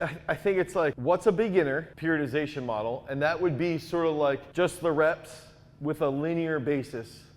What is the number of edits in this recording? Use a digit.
3